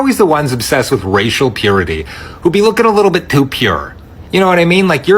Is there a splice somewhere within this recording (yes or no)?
no